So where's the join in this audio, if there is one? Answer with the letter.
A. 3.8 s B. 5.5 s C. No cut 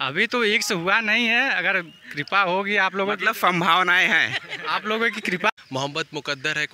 B